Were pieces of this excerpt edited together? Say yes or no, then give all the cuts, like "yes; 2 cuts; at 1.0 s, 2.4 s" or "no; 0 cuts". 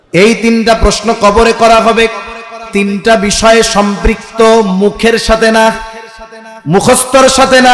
yes; 1 cut; at 2.7 s